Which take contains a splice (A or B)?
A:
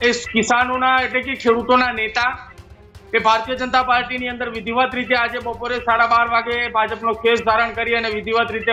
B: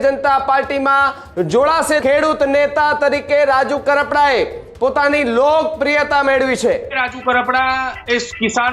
B